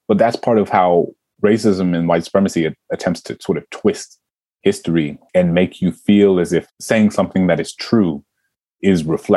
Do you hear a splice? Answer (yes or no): yes